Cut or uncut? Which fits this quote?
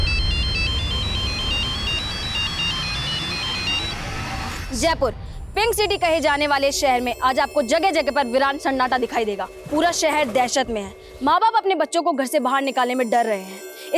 cut